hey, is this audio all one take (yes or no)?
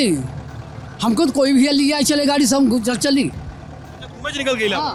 yes